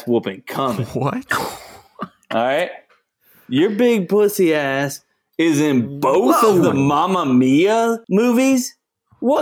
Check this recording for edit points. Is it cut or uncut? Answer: cut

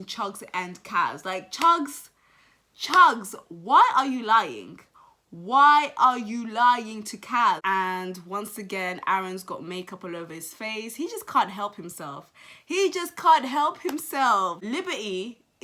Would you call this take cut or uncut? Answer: cut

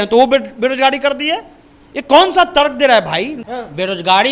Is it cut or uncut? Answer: cut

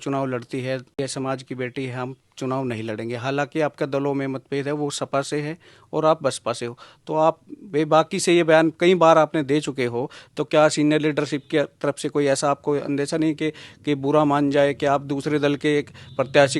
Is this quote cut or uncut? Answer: cut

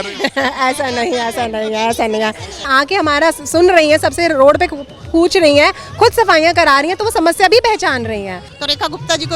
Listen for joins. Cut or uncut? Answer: cut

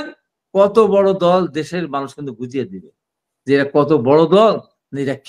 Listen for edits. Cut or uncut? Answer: uncut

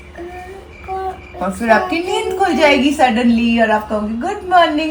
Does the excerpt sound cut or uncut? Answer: uncut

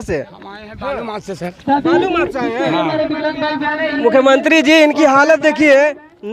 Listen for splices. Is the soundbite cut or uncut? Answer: uncut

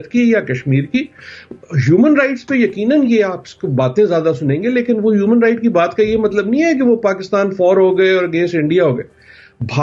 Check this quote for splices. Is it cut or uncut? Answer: uncut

